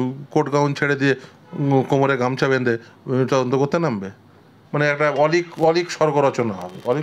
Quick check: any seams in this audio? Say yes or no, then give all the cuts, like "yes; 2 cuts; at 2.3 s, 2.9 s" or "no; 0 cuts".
yes; 1 cut; at 4.4 s